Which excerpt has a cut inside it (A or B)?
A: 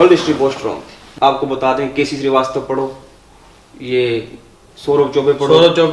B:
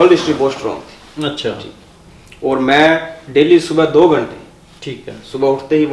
A